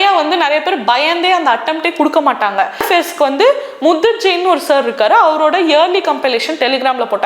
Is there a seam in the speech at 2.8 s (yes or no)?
yes